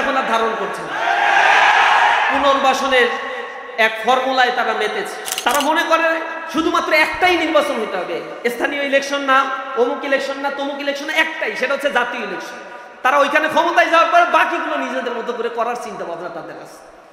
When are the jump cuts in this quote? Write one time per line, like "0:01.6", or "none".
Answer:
0:05.2